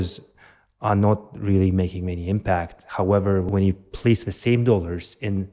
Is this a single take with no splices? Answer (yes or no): no